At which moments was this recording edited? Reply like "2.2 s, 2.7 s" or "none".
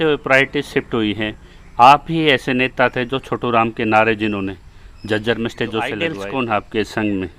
6.2 s

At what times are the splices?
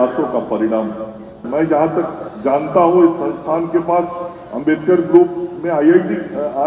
1.4 s

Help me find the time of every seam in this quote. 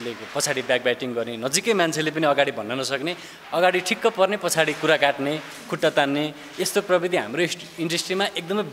none

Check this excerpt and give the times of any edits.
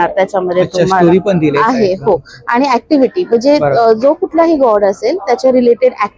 none

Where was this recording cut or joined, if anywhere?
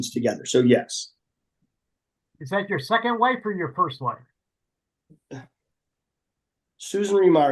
1.5 s

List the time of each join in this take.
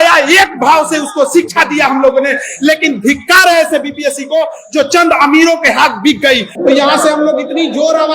6.5 s

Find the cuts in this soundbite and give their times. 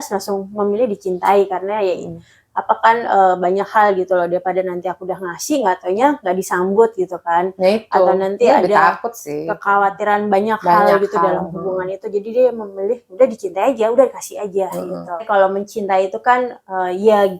15.1 s

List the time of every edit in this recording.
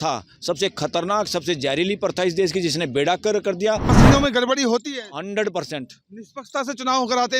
3.9 s

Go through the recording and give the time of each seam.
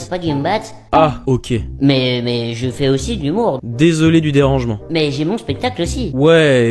none

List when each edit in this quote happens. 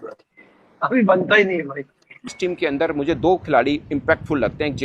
2.3 s

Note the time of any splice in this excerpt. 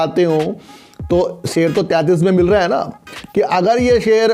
none

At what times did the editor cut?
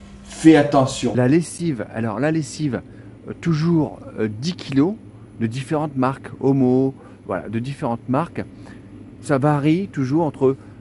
1.1 s

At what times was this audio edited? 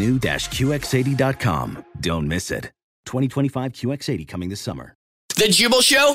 5.2 s

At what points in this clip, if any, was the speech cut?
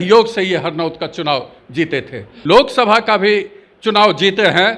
2.3 s

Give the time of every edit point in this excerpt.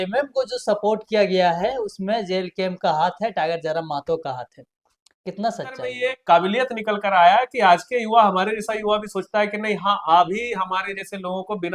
6.0 s

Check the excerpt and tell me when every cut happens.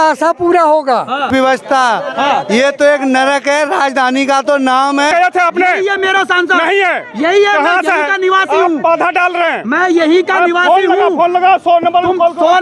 1.3 s, 5.1 s

